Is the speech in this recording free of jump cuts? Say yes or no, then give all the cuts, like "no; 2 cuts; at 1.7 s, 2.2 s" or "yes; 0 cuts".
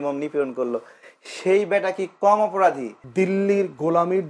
no; 1 cut; at 2.9 s